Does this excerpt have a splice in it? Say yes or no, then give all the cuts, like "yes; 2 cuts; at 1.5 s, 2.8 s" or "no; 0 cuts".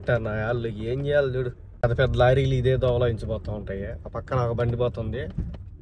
no; 0 cuts